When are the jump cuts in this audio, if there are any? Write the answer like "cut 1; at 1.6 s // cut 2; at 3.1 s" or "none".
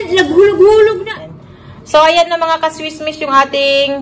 cut 1; at 1.1 s